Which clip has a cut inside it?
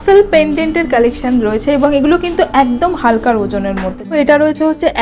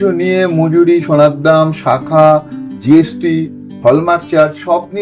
first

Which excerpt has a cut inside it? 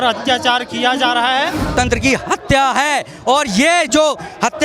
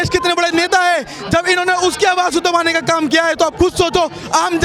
first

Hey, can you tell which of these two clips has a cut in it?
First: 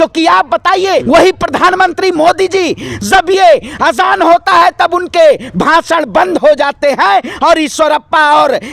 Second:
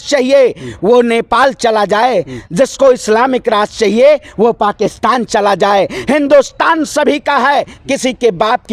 first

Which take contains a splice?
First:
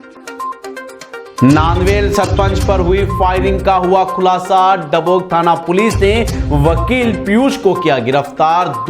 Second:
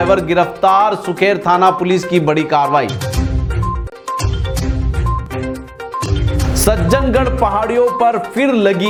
first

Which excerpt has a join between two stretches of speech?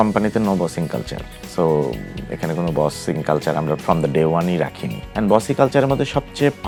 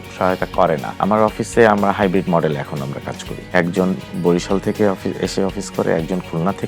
second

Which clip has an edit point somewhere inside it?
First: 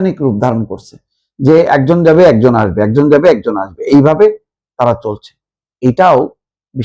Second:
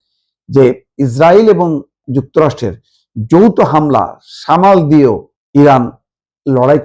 second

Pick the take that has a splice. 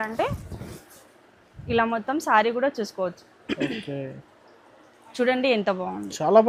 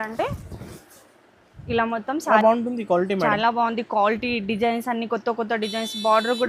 second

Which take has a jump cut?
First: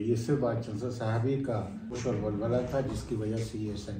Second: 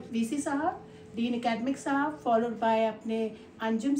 first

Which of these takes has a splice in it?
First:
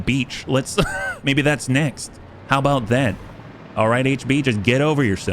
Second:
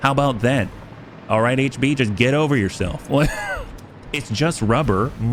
first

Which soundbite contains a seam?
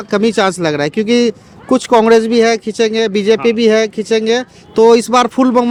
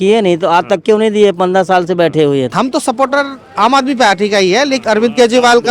second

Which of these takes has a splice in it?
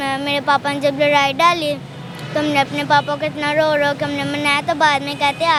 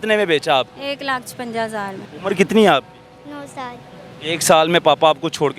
second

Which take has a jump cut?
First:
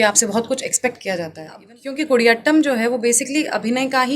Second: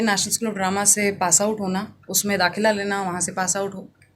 first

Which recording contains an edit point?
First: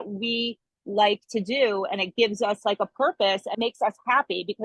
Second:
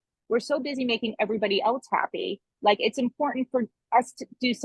first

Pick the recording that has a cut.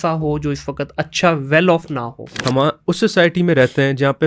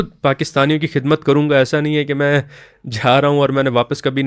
first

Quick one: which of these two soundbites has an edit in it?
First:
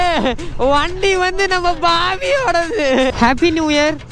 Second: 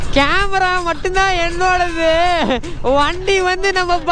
first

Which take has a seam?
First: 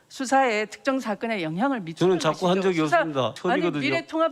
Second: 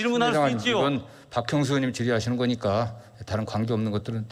first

